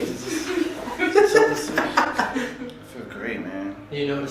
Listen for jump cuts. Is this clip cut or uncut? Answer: cut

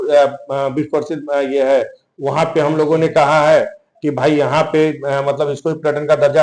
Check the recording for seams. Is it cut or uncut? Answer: uncut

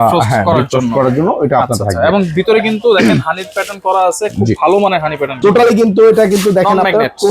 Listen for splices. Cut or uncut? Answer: cut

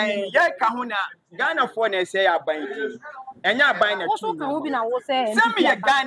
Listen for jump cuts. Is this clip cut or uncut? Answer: uncut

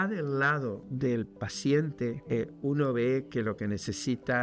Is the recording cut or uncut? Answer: cut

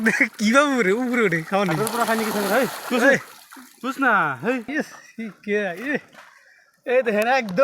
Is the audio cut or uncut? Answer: cut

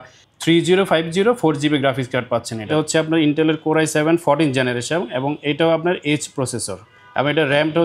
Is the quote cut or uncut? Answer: cut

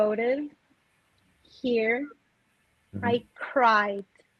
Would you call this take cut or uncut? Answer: uncut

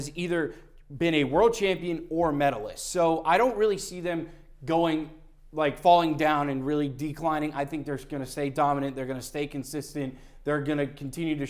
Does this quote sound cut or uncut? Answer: uncut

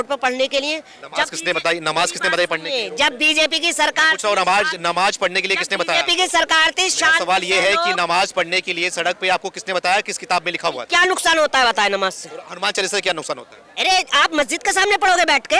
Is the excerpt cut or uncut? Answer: uncut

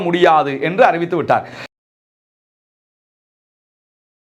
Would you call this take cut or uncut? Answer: uncut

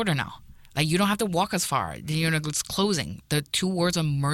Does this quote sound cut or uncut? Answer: uncut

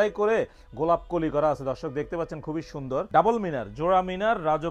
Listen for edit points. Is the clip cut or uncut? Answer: uncut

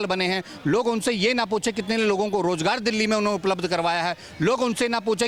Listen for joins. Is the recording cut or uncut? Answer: uncut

